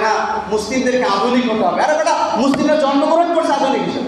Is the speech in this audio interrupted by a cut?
no; 0 cuts

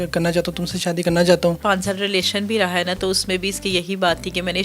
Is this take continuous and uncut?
no; 1 cut; at 1.6 s

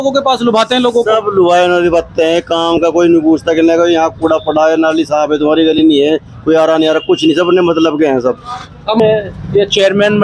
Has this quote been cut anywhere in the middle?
yes; 1 cut; at 9.0 s

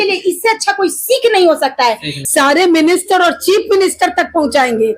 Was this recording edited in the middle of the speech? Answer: yes; 1 cut; at 2.1 s

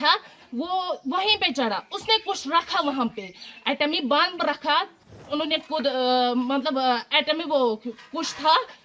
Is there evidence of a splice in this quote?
yes; 1 cut; at 5.2 s

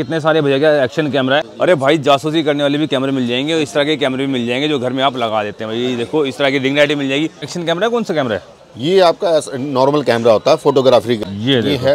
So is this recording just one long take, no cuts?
no; 3 cuts; at 1.5 s, 7.5 s, 11.2 s

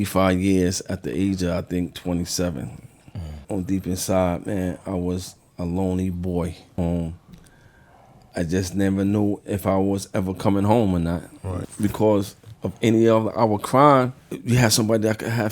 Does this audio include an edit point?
yes; 4 cuts; at 3.4 s, 6.8 s, 11.7 s, 14.3 s

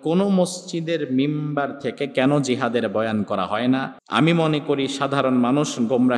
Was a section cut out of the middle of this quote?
yes; 1 cut; at 4.0 s

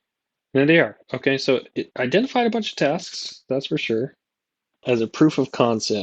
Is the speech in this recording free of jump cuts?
no; 2 cuts; at 1.8 s, 4.8 s

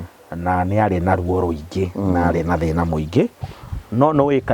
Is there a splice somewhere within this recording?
yes; 1 cut; at 3.4 s

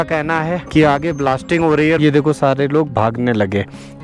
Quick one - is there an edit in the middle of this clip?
yes; 1 cut; at 2.0 s

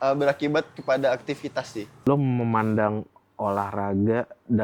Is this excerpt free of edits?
no; 1 cut; at 1.9 s

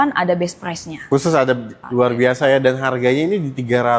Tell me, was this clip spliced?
yes; 1 cut; at 1.8 s

